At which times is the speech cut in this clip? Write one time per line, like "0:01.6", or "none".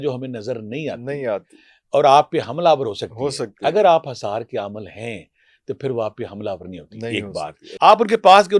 0:07.6

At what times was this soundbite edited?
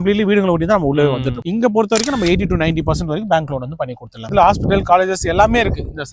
0:01.4
0:04.3

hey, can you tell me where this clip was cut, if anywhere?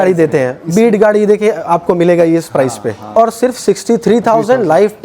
0:03.1

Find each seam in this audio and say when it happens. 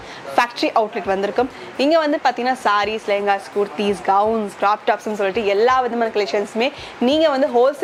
none

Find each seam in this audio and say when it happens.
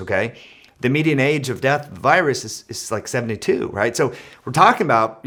none

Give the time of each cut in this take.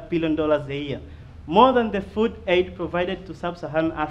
none

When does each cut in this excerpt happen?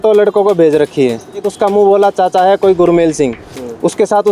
0:01.5

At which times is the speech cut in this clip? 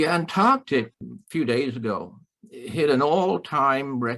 0:01.0

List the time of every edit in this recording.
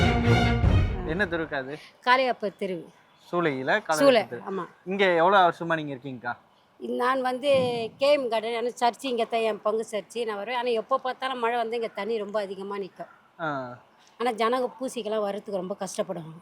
0:00.9

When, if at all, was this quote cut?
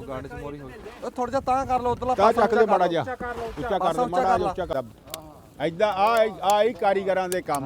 0:04.7

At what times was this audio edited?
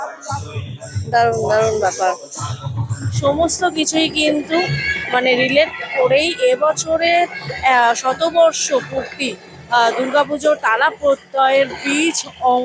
0:03.1

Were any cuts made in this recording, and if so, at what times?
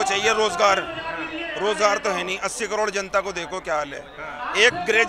none

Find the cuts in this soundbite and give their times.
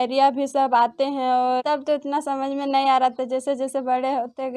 0:01.6

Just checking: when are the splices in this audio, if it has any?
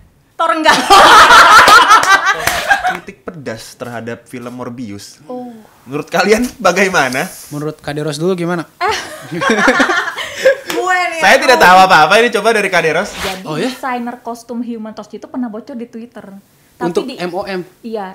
0:03.0
0:13.1

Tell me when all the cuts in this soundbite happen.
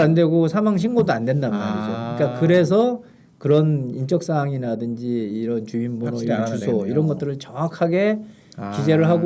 none

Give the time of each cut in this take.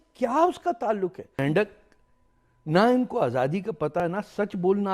0:01.4
0:04.0

